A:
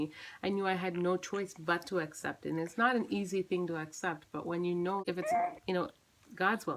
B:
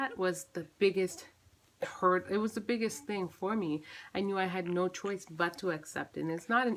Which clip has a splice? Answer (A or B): A